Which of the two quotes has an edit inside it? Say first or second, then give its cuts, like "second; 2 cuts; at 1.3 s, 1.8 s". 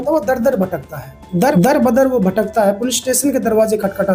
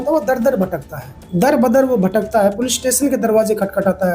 second; 1 cut; at 1.4 s